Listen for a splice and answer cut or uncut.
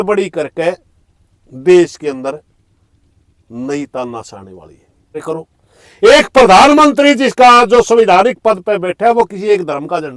cut